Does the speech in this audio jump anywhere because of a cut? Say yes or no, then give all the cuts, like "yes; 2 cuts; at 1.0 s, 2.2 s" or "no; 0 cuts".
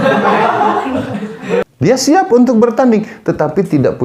yes; 1 cut; at 1.7 s